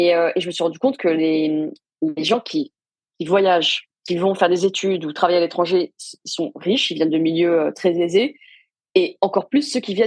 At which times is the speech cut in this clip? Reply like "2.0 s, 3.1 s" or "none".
none